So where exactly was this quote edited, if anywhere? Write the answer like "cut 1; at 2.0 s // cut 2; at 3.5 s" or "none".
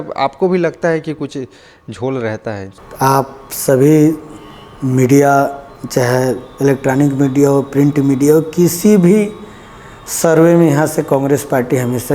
cut 1; at 2.8 s